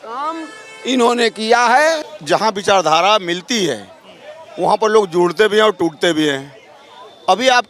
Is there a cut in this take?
yes; 1 cut; at 2.1 s

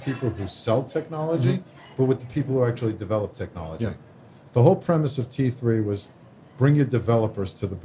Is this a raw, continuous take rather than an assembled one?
yes; 0 cuts

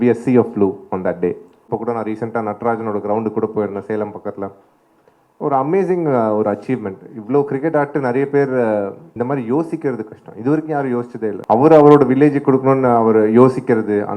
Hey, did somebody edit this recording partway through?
yes; 3 cuts; at 1.6 s, 9.0 s, 11.4 s

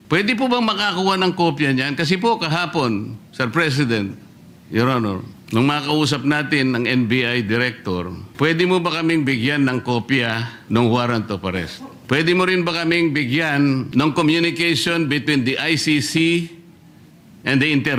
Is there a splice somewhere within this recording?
no; 0 cuts

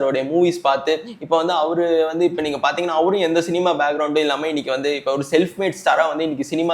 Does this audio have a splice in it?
no; 0 cuts

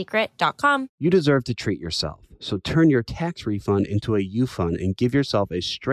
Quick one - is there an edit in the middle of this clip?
yes; 1 cut; at 0.9 s

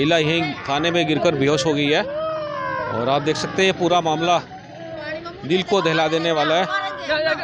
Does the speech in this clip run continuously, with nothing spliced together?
yes; 0 cuts

